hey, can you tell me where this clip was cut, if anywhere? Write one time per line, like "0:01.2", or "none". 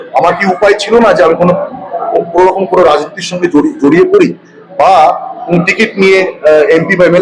none